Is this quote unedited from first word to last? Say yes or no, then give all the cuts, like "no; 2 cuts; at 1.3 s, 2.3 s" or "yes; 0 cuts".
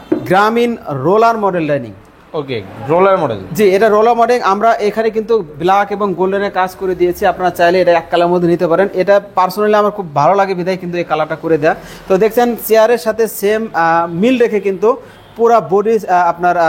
yes; 0 cuts